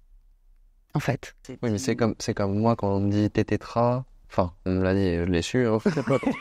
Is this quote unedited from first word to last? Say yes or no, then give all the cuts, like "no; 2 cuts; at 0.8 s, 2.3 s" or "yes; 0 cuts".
no; 2 cuts; at 1.4 s, 4.2 s